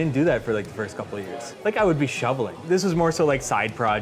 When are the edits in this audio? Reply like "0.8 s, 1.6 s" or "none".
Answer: 1.5 s, 2.6 s

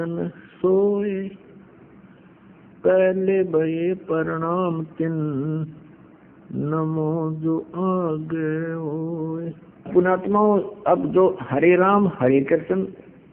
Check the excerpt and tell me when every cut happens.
9.9 s

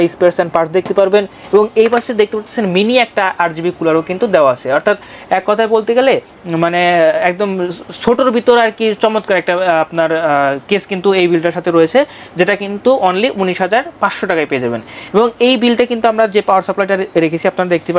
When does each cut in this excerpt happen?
none

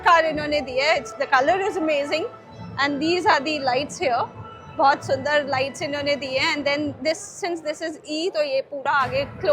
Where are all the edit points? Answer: none

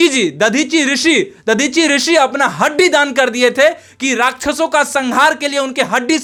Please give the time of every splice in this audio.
none

